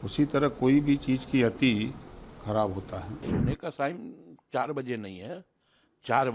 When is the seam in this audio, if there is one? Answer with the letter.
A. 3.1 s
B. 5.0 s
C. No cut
A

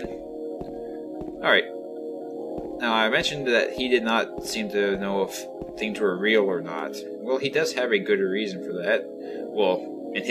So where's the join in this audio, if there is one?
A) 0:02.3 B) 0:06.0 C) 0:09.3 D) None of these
B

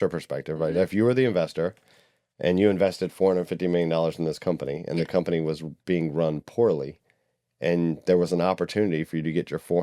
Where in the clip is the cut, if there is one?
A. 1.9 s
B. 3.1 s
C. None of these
C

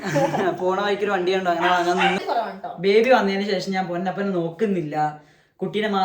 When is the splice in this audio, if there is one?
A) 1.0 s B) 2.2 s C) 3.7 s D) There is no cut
B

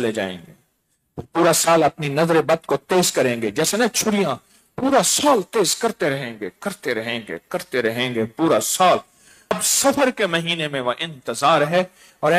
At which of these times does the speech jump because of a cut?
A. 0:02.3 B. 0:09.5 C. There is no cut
B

